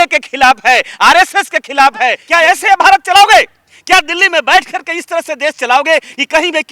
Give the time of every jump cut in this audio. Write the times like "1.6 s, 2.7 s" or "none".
2.2 s